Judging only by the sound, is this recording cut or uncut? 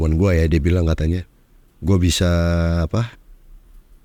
uncut